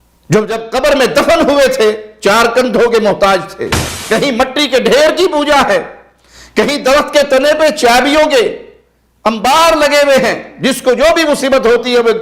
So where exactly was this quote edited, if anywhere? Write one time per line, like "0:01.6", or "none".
0:03.9